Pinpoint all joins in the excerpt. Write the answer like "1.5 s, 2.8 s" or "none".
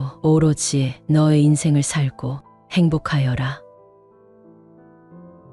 none